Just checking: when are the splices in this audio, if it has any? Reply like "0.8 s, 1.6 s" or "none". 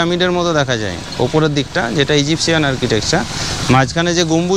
none